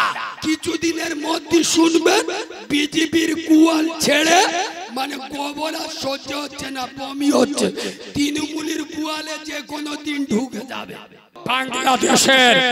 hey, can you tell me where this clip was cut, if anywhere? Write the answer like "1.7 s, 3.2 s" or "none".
11.4 s